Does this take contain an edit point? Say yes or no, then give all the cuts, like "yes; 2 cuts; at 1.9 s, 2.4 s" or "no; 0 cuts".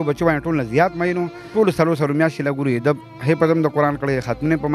yes; 1 cut; at 1.5 s